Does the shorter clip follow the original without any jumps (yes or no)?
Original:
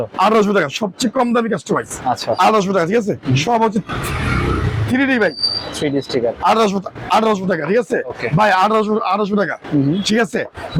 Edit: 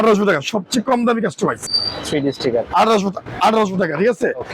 no